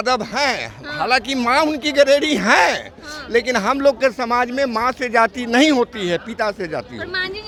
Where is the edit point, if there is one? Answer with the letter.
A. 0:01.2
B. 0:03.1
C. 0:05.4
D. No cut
D